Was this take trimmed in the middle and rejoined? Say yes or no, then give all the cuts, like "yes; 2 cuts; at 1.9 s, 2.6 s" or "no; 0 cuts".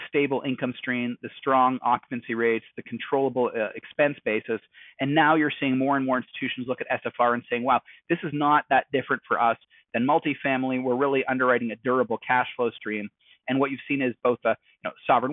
no; 0 cuts